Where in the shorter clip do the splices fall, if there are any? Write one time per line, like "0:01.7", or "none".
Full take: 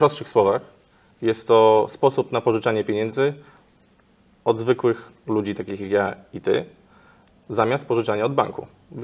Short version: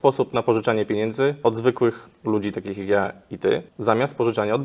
0:01.4
0:03.7

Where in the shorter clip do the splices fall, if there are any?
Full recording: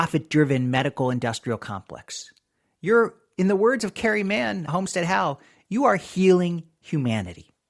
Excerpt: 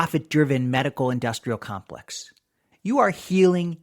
0:02.7

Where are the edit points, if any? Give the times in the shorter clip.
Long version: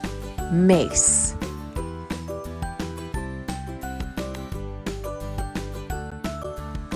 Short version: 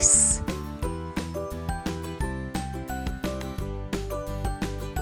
none

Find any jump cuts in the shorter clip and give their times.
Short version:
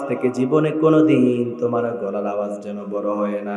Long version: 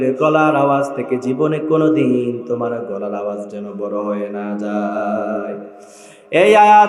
none

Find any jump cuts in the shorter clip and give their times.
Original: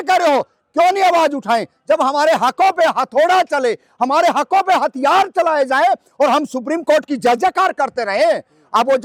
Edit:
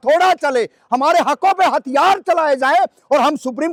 none

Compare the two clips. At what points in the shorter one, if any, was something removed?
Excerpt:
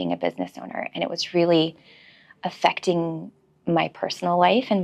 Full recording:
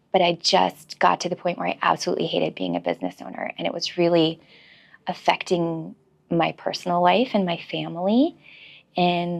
none

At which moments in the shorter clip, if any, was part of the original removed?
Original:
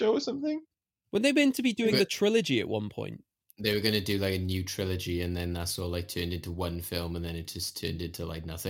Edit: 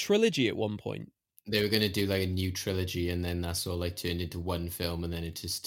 none

